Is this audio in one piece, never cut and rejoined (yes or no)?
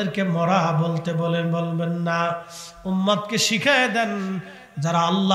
yes